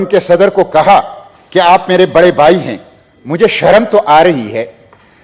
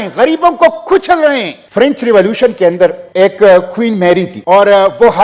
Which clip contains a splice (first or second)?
second